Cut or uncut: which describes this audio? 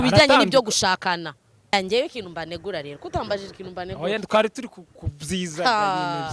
cut